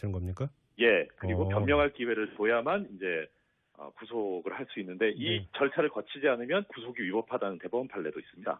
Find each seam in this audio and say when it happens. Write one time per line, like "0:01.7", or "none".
0:01.9